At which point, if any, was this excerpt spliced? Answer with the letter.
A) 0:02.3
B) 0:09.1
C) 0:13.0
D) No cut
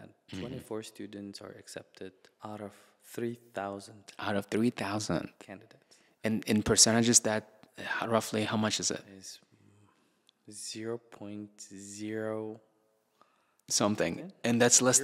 A